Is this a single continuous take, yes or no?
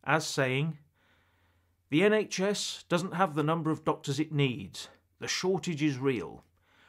yes